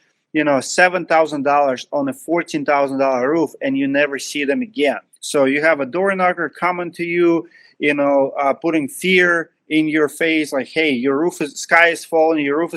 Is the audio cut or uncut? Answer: cut